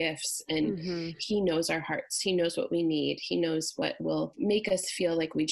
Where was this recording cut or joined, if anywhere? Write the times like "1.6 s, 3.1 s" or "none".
4.3 s